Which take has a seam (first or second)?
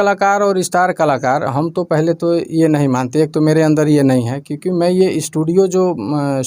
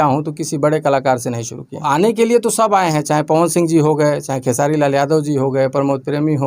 second